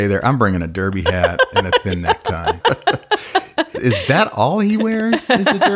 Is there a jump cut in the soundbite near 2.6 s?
yes; 2 cuts; at 2.6 s, 3.7 s

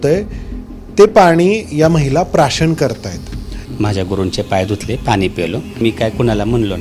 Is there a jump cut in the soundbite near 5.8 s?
yes; 2 cuts; at 3.6 s, 5.8 s

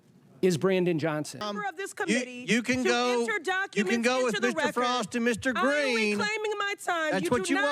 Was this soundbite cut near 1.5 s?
yes; 1 cut; at 1.5 s

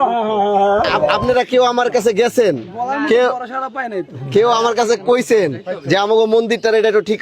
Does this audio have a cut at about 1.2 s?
yes; 1 cut; at 1.2 s

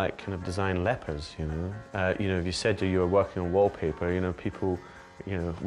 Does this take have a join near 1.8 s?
yes; 1 cut; at 1.8 s

